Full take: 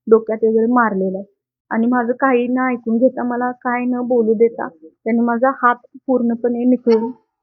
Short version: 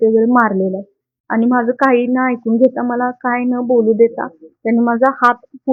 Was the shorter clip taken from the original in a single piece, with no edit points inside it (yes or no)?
yes